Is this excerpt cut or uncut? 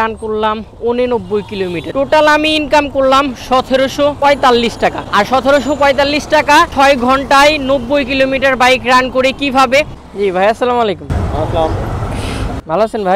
cut